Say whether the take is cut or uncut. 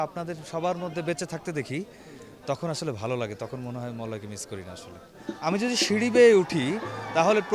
cut